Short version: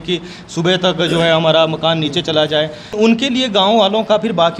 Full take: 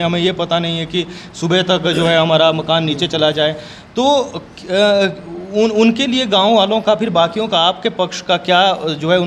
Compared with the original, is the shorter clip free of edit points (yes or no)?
no